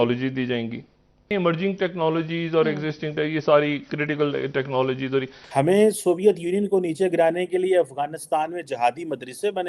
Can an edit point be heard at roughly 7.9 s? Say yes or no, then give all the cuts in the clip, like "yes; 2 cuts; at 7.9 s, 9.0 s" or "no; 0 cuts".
no; 2 cuts; at 1.3 s, 5.4 s